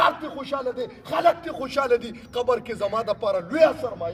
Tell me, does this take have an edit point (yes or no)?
no